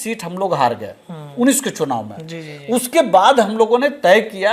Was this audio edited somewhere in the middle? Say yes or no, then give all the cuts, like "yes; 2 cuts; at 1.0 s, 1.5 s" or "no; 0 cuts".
no; 0 cuts